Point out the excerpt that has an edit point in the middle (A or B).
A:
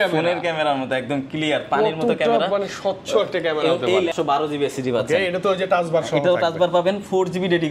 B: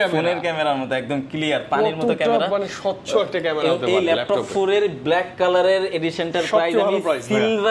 A